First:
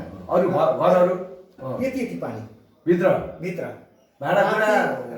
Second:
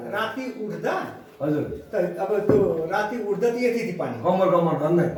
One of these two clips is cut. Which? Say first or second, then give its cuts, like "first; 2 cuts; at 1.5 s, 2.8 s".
first; 1 cut; at 1.6 s